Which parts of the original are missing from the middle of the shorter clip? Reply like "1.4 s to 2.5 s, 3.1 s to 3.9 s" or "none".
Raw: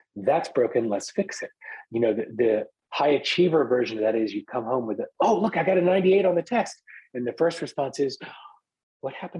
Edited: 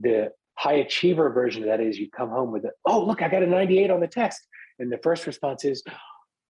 none